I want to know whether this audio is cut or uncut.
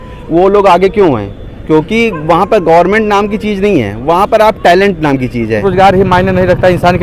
cut